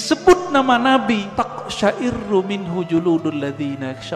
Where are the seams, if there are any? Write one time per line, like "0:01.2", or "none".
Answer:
0:01.3

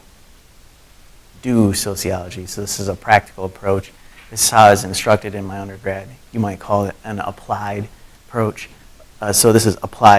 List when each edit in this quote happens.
0:03.6

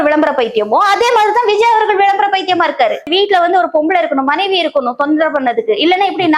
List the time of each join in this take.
0:03.1

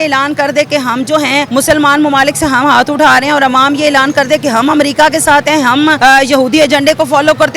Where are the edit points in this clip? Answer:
0:01.5
0:06.0

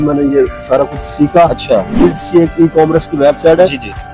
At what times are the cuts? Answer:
0:01.9

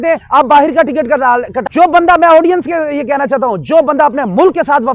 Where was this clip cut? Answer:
0:01.6

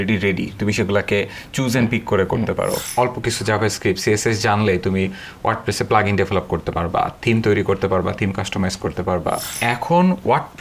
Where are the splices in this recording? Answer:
0:02.8
0:09.5

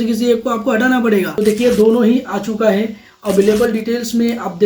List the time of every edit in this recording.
0:01.3

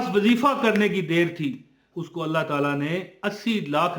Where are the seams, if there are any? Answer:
0:01.8

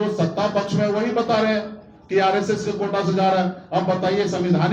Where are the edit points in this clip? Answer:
none

